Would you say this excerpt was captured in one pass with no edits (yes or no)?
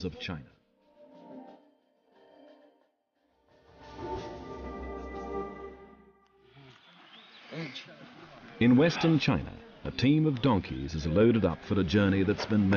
yes